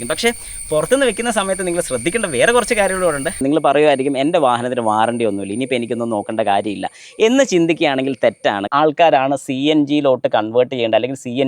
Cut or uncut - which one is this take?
cut